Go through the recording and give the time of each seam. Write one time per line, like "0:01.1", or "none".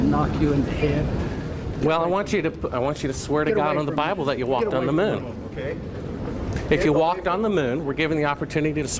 none